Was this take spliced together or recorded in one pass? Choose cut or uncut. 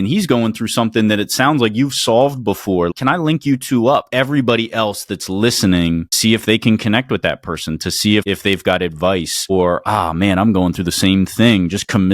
cut